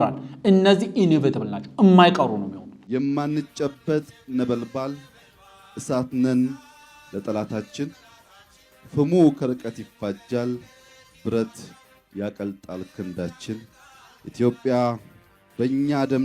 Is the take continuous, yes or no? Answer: no